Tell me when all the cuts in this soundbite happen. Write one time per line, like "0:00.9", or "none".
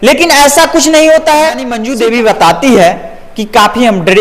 0:01.8